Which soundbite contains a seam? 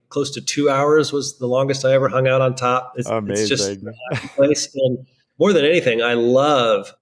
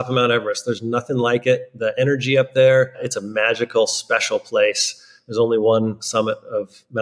second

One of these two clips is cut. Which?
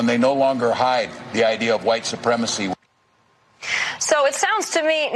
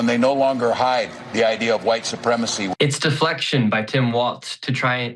second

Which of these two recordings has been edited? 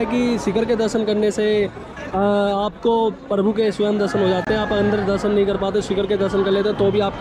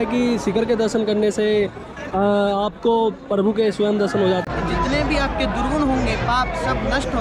second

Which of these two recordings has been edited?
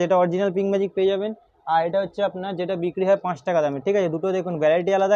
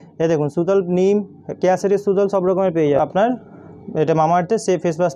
second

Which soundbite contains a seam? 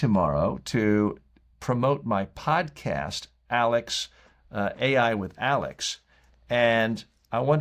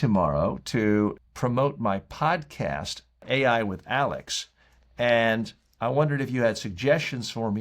second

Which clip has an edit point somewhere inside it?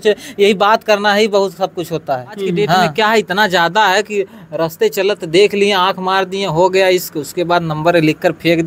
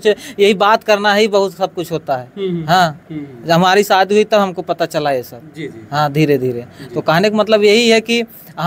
first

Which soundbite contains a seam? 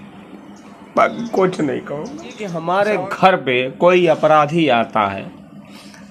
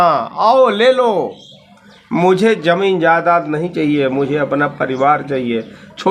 first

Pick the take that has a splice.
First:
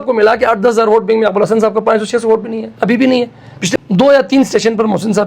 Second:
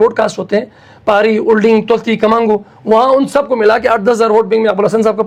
first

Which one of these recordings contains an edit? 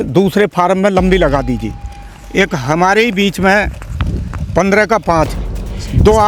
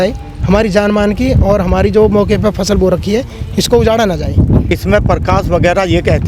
second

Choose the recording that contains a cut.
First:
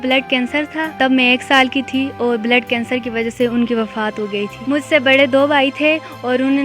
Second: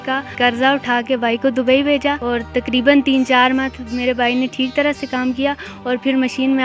first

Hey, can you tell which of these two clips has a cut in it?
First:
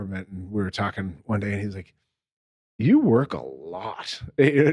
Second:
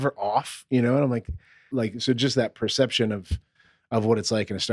second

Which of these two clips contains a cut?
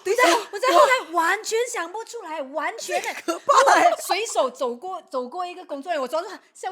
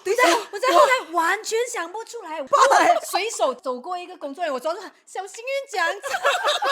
second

